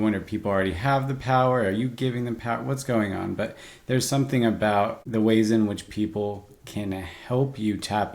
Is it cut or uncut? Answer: cut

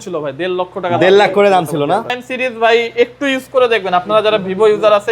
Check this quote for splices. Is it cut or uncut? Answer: cut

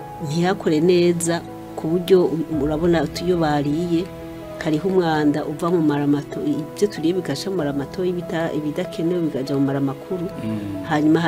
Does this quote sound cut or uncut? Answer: uncut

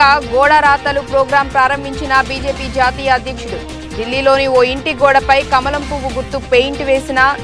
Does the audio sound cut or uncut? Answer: uncut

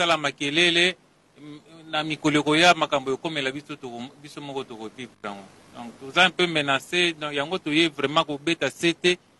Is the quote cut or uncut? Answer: uncut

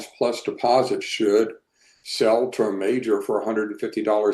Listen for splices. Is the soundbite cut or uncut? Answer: uncut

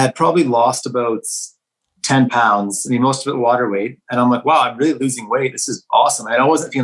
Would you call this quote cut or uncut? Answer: uncut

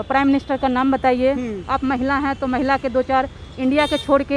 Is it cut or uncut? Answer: uncut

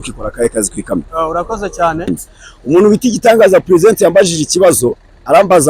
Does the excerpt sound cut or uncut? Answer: cut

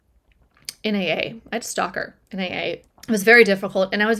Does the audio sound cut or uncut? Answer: cut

